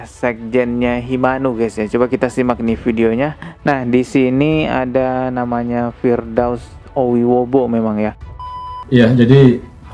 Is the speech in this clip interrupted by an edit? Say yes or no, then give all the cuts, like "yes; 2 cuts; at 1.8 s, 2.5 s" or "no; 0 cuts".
yes; 1 cut; at 8.5 s